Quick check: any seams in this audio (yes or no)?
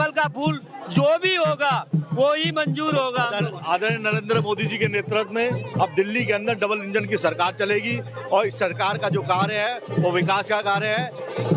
no